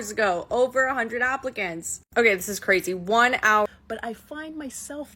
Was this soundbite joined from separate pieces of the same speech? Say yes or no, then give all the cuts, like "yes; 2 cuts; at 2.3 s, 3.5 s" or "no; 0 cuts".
yes; 1 cut; at 3.7 s